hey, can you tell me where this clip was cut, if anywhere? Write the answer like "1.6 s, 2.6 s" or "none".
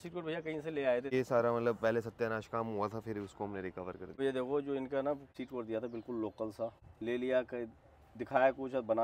1.1 s, 4.2 s, 5.3 s, 6.9 s